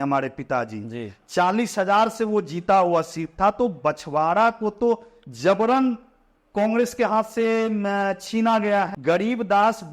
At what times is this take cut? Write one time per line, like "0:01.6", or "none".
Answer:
0:08.9